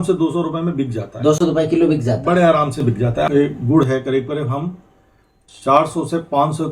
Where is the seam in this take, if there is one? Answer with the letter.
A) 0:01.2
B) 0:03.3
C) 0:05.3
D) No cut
B